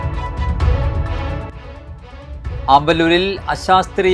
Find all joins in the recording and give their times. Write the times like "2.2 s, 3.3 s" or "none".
1.5 s